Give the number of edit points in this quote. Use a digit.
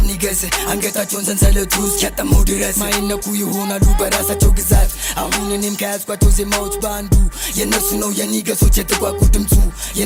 0